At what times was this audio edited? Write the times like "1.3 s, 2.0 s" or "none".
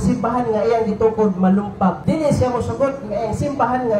2.0 s